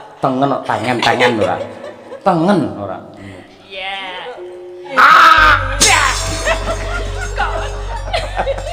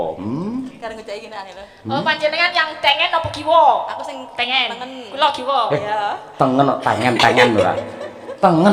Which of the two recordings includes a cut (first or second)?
first